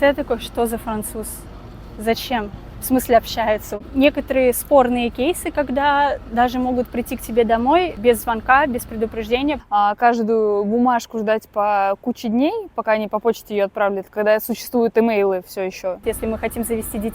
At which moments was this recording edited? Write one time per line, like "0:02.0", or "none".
0:03.8
0:08.0
0:09.6
0:16.0